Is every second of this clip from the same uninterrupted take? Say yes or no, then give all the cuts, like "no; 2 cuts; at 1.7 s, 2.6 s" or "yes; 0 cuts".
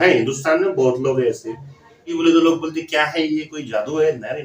no; 1 cut; at 2.2 s